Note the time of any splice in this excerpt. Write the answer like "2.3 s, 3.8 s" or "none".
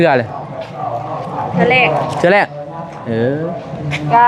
none

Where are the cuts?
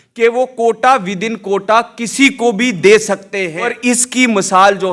3.6 s

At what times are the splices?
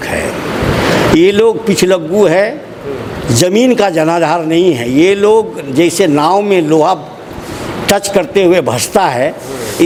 none

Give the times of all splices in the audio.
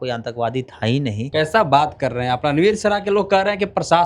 1.3 s

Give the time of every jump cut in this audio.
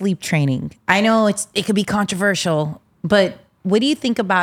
3.5 s

